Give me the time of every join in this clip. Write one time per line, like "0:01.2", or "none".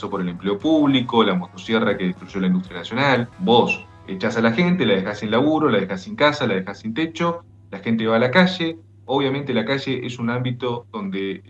0:03.3